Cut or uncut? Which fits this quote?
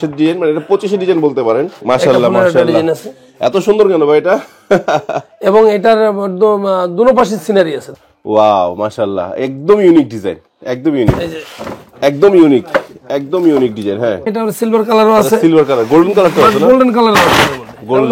cut